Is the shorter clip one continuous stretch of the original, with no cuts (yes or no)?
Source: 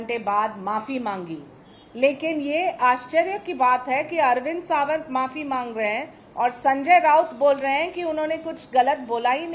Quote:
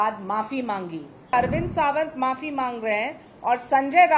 no